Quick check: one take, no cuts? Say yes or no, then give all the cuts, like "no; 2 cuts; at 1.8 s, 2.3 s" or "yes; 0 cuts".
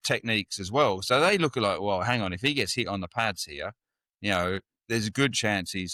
yes; 0 cuts